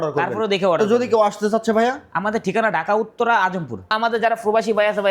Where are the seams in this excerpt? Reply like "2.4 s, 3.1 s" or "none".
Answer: 3.9 s